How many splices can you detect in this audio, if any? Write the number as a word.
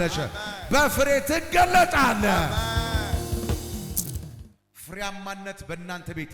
one